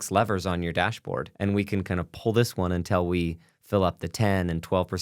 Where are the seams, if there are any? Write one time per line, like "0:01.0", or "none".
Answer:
0:01.3